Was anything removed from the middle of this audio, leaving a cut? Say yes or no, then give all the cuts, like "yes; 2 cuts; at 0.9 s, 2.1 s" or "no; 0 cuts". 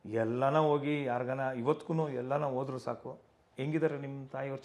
no; 0 cuts